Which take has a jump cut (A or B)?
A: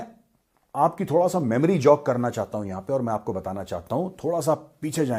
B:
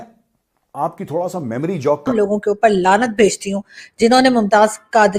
B